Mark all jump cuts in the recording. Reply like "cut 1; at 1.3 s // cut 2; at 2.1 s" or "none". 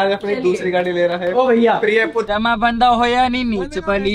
cut 1; at 2.3 s

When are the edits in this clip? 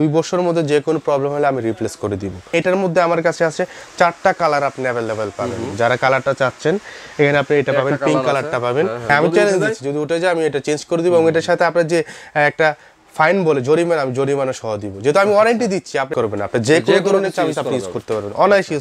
cut 1; at 2.5 s // cut 2; at 9.1 s // cut 3; at 16.1 s

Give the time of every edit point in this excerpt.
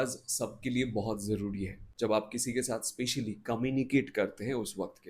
cut 1; at 1.8 s

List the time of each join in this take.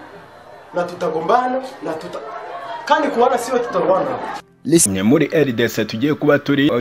cut 1; at 4.9 s

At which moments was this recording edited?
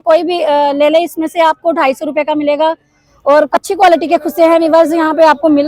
cut 1; at 3.5 s

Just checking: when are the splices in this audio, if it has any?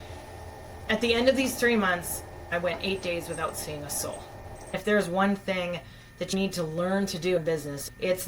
cut 1; at 4.5 s

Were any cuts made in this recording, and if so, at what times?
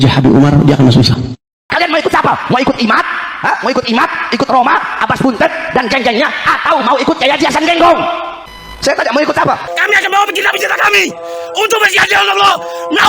cut 1; at 1.3 s // cut 2; at 9.6 s

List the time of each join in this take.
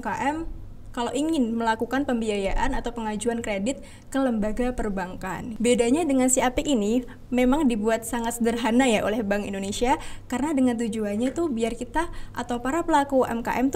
cut 1; at 5.4 s

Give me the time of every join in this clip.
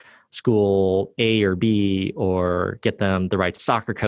cut 1; at 2.8 s

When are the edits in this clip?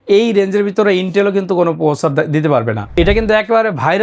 cut 1; at 3.0 s

